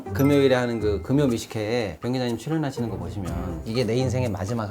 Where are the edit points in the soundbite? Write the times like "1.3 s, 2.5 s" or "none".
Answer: 3.6 s